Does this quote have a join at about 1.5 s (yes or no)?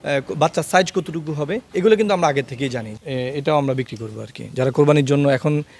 no